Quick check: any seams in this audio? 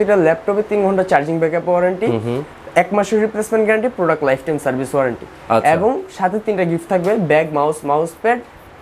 no; 0 cuts

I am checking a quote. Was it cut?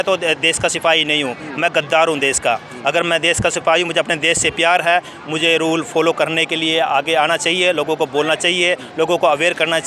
no; 0 cuts

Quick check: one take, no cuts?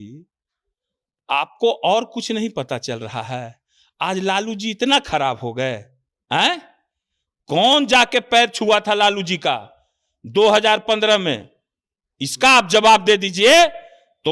yes; 0 cuts

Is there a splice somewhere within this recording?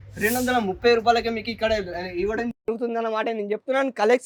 no; 0 cuts

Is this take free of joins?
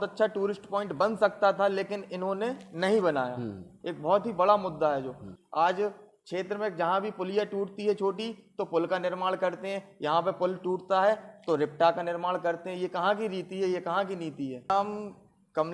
no; 2 cuts; at 5.3 s, 14.7 s

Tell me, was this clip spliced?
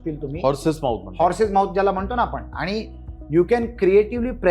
no; 0 cuts

